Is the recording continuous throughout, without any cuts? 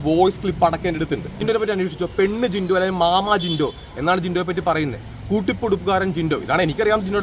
no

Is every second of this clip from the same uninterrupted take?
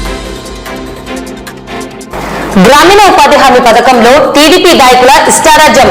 no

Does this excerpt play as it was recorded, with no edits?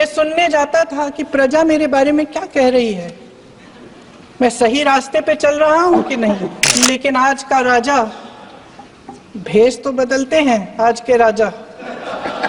no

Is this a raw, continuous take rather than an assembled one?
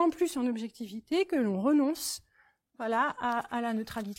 yes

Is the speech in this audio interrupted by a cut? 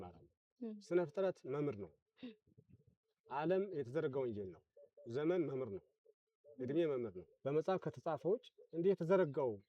yes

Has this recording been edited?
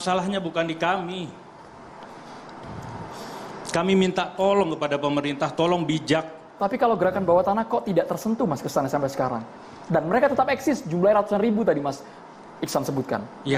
no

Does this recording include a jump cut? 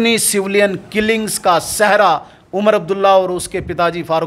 no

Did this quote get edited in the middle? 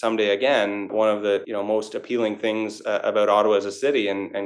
yes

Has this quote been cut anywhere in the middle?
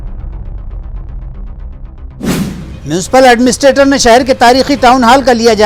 yes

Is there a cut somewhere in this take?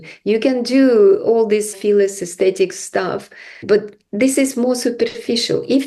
yes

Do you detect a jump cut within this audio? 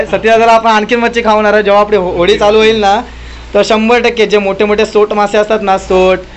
no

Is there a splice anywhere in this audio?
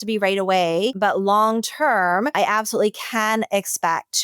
yes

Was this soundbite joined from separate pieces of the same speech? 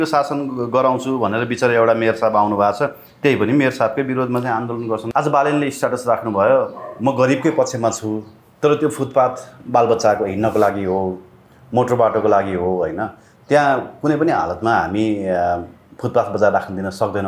yes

